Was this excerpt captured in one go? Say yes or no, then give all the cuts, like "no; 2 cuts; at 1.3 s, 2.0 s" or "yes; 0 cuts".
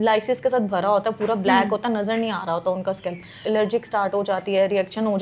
no; 1 cut; at 3.4 s